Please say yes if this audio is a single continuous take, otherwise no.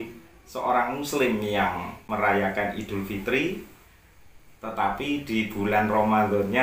no